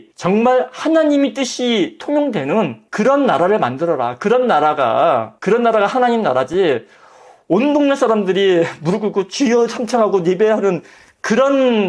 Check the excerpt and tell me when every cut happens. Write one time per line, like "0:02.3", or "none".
none